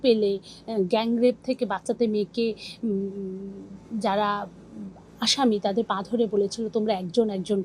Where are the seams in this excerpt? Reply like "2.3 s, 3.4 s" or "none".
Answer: none